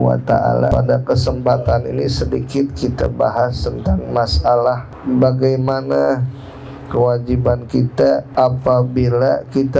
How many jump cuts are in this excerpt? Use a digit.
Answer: 3